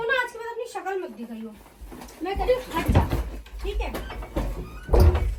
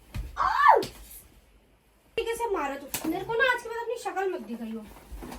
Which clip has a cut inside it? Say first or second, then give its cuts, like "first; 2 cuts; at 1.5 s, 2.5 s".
second; 1 cut; at 2.2 s